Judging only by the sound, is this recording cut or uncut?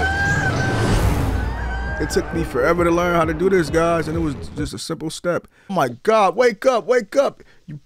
cut